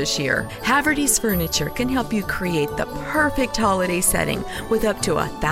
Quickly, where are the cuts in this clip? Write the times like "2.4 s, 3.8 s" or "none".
none